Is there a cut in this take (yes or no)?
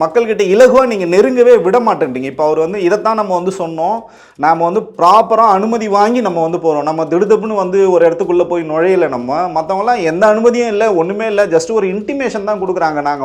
no